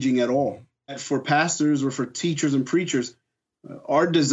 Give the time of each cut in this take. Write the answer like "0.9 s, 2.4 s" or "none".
1.0 s